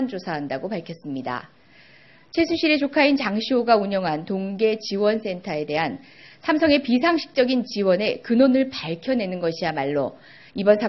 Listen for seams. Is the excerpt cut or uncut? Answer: cut